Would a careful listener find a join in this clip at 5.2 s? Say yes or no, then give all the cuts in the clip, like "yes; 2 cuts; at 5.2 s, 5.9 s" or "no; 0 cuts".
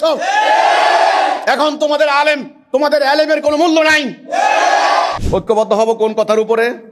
yes; 1 cut; at 5.2 s